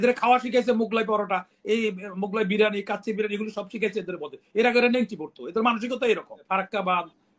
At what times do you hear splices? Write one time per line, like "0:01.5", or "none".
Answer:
0:06.3